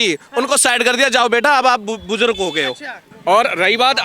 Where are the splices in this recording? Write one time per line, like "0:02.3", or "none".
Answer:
0:02.9